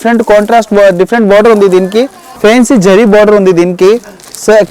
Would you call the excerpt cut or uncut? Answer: cut